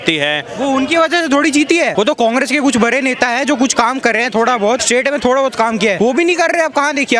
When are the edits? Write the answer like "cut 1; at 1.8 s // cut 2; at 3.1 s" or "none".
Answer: cut 1; at 1.9 s // cut 2; at 4.8 s // cut 3; at 6.0 s